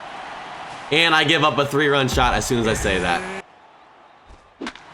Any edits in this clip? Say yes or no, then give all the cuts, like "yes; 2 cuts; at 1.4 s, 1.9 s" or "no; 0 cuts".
yes; 1 cut; at 3.3 s